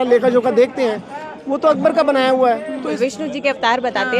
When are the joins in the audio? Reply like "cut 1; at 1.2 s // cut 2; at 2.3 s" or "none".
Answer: cut 1; at 2.9 s